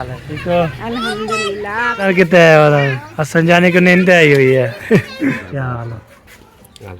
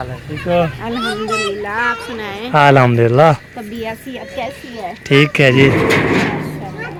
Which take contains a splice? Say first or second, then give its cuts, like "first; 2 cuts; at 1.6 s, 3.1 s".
first; 2 cuts; at 2.1 s, 5.5 s